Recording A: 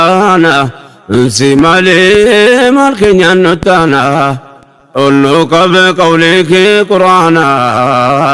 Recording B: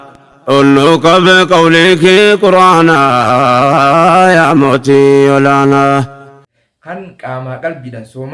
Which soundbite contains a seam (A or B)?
B